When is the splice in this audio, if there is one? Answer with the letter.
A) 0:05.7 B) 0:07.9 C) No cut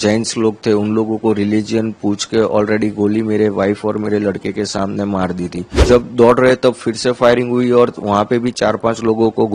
A